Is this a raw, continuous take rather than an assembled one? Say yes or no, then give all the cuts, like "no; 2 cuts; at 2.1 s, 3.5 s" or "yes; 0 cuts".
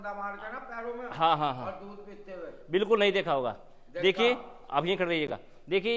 yes; 0 cuts